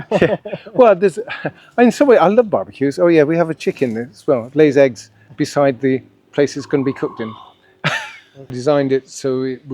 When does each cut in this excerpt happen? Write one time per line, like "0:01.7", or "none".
0:08.6